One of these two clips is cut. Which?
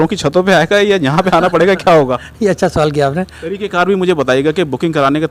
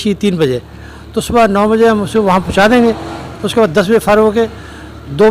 first; 1 cut; at 3.4 s

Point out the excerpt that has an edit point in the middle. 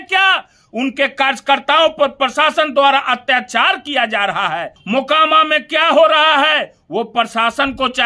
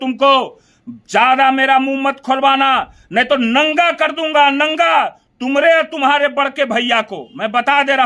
first; 1 cut; at 4.8 s

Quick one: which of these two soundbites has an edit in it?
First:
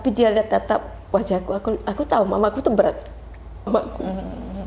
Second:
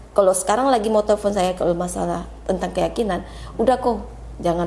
first; 1 cut; at 3.7 s

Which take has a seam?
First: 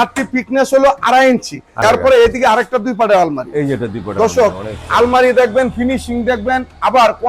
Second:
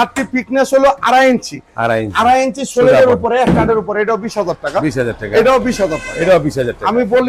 first; 1 cut; at 1.7 s

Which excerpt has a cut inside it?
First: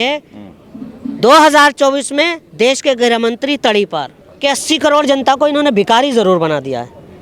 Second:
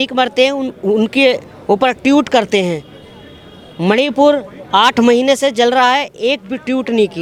first; 1 cut; at 4.2 s

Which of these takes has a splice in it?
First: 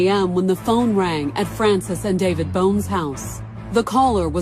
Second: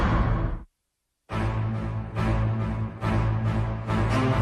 first; 1 cut; at 2.5 s

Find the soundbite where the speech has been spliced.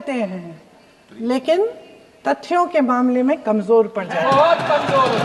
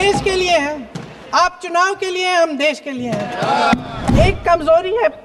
second; 1 cut; at 4.1 s

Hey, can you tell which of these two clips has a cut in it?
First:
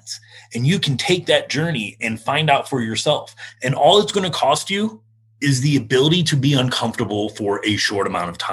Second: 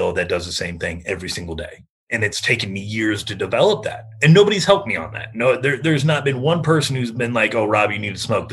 first; 2 cuts; at 2.0 s, 5.3 s

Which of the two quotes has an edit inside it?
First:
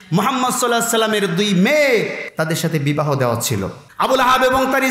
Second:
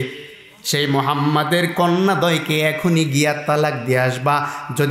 first; 2 cuts; at 2.2 s, 3.8 s

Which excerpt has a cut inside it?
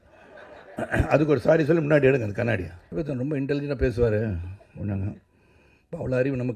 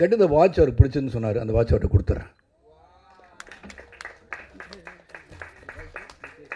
first; 1 cut; at 2.8 s

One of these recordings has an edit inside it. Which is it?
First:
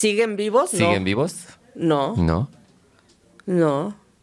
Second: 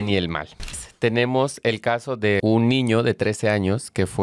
second; 2 cuts; at 0.8 s, 2.4 s

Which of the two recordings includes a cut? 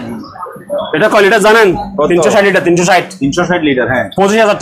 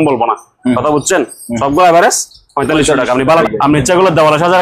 second; 1 cut; at 3.2 s

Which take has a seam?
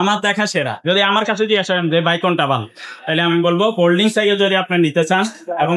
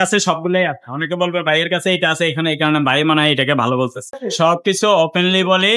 second; 1 cut; at 4.2 s

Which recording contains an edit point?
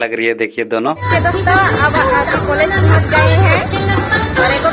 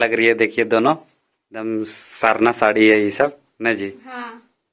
first; 1 cut; at 1.0 s

